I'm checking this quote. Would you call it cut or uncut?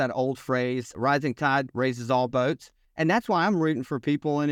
cut